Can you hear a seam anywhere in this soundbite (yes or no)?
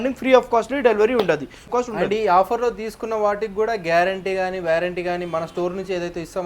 yes